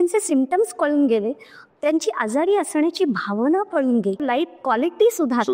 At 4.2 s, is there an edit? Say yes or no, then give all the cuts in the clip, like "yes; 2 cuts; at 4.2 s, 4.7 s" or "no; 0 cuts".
yes; 1 cut; at 4.2 s